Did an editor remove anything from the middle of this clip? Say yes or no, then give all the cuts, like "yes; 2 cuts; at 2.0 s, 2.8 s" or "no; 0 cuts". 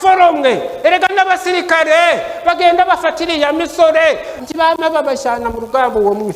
yes; 1 cut; at 4.3 s